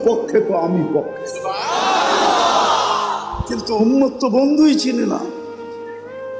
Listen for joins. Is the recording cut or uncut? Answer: cut